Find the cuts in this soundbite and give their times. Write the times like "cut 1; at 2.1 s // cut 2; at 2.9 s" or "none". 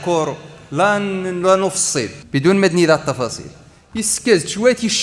cut 1; at 2.2 s